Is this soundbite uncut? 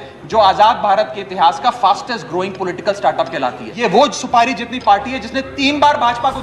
no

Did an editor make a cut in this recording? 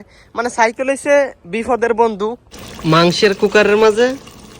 yes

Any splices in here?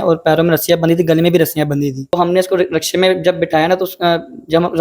yes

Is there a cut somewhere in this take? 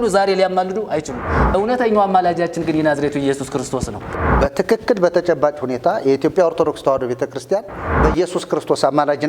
yes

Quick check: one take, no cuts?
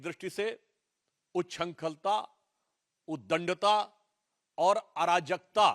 yes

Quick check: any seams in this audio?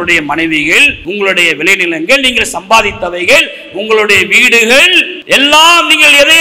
yes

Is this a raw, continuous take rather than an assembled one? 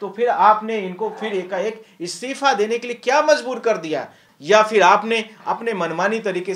no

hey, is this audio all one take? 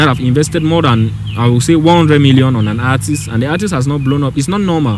yes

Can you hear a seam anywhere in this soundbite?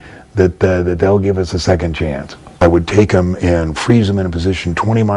yes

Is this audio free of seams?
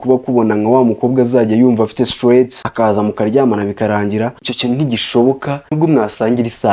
no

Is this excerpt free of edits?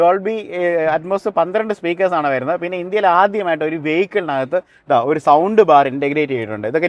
yes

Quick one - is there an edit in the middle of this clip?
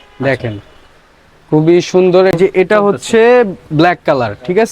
yes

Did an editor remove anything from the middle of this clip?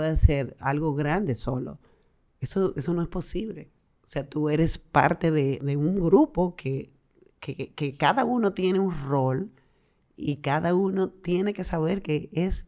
no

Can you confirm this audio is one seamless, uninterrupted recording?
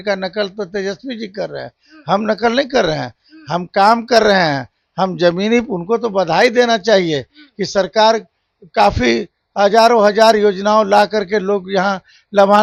yes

